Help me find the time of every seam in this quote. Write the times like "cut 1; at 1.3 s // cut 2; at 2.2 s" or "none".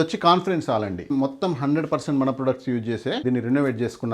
cut 1; at 1.1 s // cut 2; at 3.2 s